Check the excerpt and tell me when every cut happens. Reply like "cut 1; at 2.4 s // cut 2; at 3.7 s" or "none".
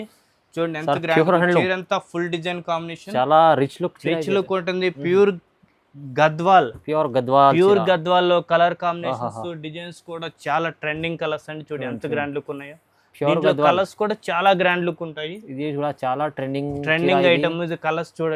none